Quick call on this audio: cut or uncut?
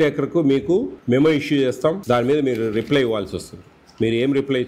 cut